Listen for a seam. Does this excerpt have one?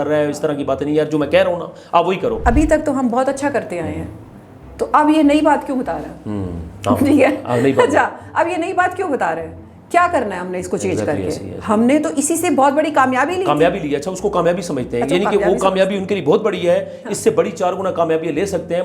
yes; 1 cut; at 2.4 s

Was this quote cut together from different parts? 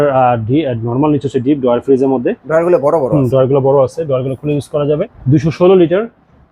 yes; 1 cut; at 5.2 s

